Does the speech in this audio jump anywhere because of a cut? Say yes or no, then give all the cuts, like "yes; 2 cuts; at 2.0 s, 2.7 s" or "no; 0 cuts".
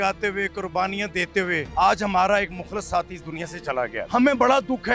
yes; 2 cuts; at 1.7 s, 4.1 s